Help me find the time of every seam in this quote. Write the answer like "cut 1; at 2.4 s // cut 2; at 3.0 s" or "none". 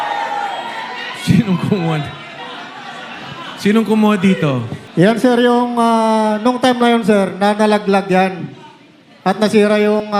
cut 1; at 4.8 s